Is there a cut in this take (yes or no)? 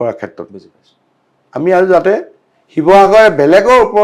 no